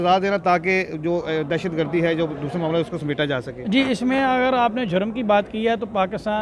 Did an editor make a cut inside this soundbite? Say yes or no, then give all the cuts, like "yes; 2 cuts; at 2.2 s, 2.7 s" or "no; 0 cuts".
no; 0 cuts